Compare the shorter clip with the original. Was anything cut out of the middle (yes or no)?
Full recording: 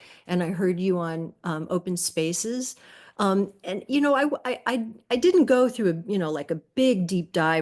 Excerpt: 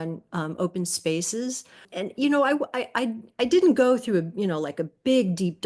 yes